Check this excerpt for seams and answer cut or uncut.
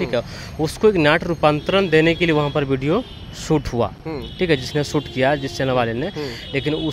uncut